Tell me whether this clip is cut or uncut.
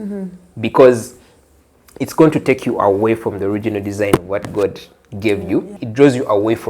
cut